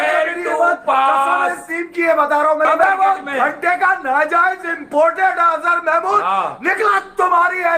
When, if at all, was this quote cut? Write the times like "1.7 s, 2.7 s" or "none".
2.7 s